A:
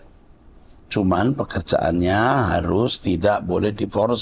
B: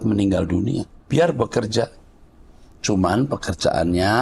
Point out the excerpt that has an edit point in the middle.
B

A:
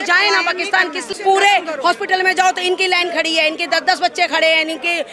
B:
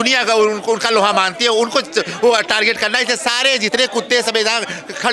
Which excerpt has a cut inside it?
A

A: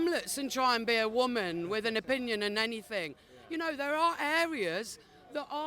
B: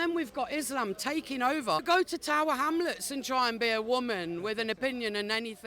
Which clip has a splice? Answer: B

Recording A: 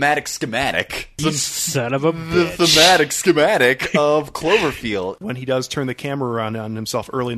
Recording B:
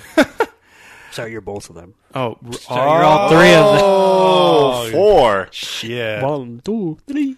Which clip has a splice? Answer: A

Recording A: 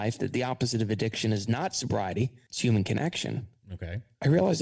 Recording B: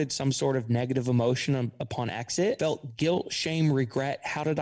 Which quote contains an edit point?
B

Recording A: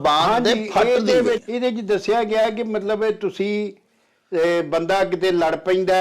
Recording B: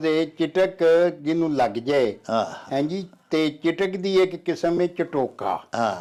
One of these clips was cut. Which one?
A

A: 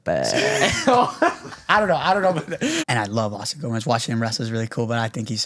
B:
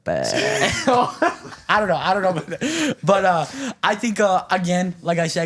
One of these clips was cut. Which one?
A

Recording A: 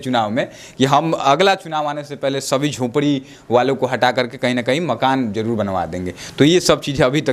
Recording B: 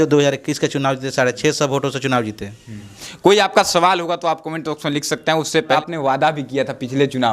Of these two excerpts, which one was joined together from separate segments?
B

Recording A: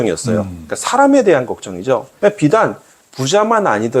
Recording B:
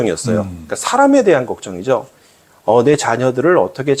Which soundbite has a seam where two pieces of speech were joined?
A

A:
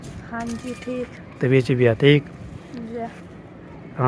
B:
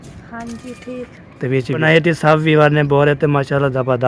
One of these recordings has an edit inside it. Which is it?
B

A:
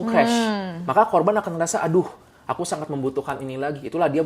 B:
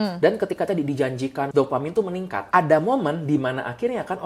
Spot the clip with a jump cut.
B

